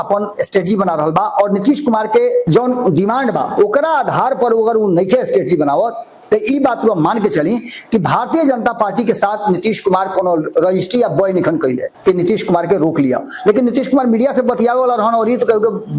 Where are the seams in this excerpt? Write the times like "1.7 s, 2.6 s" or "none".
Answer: 2.4 s, 11.9 s